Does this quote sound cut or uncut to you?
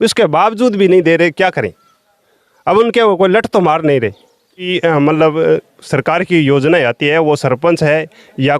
cut